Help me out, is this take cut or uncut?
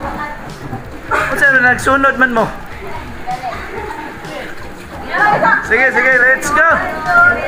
uncut